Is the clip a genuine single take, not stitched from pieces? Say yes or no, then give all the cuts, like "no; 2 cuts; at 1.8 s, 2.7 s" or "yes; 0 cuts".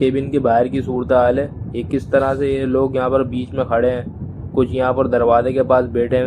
yes; 0 cuts